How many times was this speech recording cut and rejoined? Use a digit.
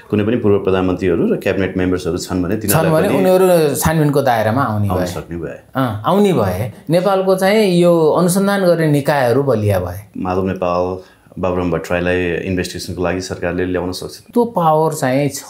3